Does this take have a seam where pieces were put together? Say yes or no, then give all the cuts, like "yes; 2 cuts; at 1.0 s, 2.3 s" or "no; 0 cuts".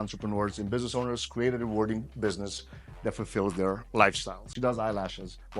yes; 1 cut; at 4.5 s